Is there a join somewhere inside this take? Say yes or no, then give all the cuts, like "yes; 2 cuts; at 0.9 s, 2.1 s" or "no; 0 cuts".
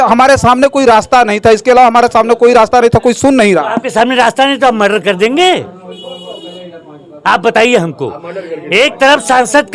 no; 0 cuts